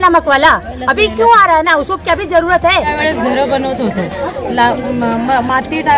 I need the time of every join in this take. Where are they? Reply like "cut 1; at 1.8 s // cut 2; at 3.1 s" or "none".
cut 1; at 2.9 s